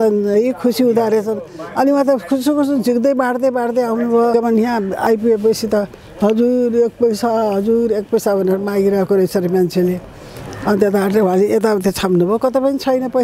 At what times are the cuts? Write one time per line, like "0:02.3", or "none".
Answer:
0:04.3